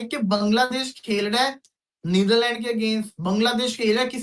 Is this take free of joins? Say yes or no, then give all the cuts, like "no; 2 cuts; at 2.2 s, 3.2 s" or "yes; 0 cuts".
yes; 0 cuts